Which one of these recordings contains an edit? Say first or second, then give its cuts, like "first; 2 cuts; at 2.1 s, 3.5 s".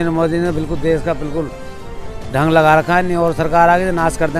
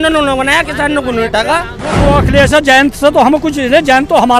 second; 1 cut; at 2.0 s